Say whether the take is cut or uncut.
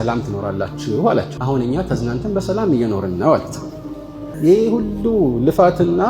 cut